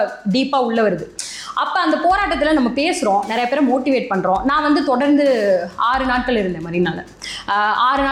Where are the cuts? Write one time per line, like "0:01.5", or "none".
none